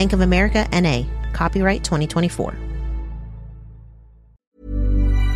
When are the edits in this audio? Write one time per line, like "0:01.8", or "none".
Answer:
0:04.4